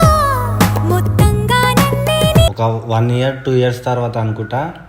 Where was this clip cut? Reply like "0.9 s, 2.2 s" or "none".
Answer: 2.5 s

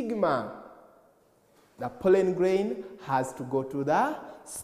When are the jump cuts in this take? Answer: none

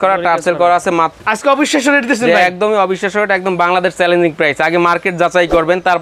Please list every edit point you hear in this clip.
1.2 s

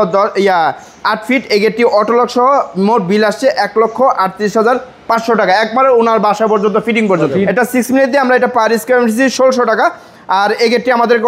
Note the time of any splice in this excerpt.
7.5 s

